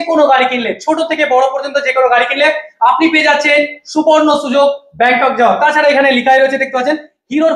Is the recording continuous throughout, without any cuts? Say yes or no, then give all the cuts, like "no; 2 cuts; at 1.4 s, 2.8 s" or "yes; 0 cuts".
yes; 0 cuts